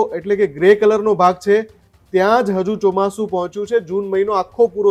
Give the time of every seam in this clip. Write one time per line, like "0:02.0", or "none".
none